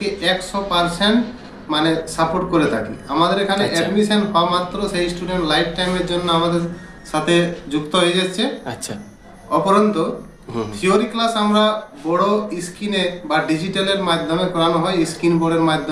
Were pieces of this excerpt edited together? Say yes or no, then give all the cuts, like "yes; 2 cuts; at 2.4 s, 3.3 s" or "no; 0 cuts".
no; 0 cuts